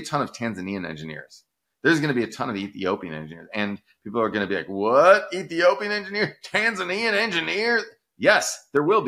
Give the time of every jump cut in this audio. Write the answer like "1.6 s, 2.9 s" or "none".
none